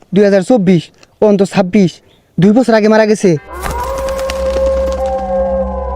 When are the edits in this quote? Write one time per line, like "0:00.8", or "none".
0:03.4